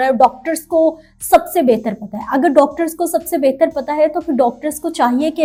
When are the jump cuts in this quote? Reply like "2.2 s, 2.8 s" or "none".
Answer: none